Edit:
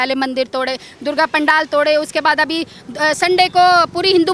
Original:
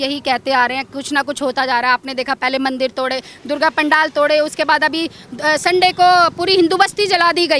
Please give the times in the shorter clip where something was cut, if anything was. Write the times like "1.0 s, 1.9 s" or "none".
none